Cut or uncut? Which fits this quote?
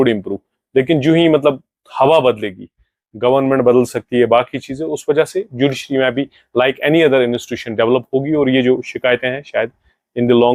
uncut